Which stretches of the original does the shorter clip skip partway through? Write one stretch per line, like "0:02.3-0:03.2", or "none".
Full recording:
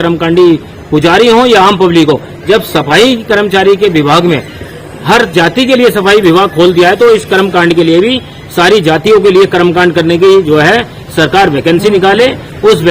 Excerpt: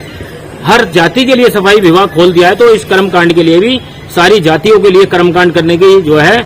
none

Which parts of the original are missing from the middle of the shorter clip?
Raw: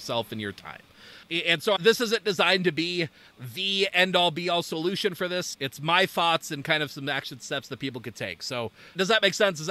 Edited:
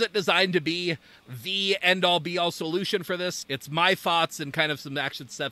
none

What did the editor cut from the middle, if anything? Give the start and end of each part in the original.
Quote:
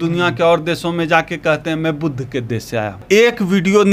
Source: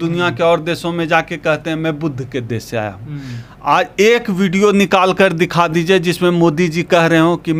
0:03.0-0:03.9

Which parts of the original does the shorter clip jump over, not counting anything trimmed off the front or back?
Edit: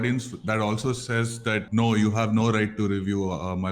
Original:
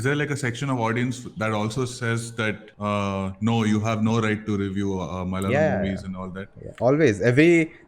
0:02.6-0:03.4

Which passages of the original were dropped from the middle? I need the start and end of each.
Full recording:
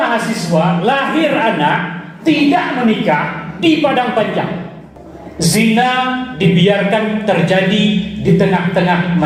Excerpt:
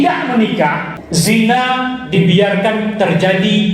0:03.4-0:05.2

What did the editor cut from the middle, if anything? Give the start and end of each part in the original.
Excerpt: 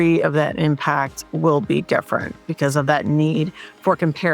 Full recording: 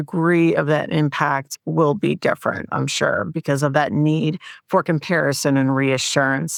0:02.7-0:03.3

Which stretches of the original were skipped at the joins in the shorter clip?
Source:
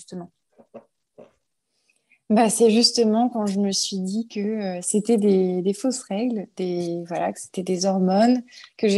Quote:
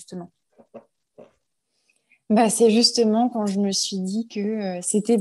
none

